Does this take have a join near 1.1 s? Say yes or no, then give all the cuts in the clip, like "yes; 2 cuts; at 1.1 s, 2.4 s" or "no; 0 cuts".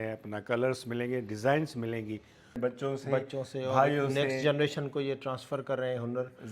no; 1 cut; at 2.5 s